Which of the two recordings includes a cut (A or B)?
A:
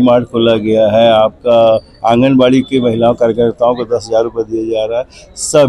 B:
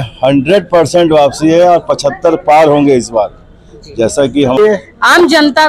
B